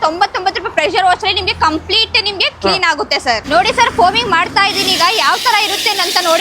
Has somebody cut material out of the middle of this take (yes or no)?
yes